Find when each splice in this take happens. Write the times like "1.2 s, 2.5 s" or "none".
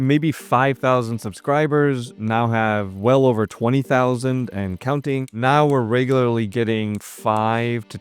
5.3 s